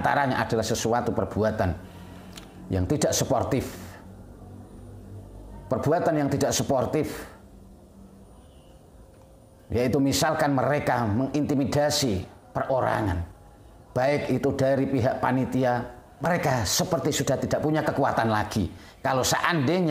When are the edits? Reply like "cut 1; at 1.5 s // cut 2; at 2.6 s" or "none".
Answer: cut 1; at 16.2 s